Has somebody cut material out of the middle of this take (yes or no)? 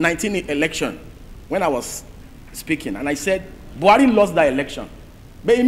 no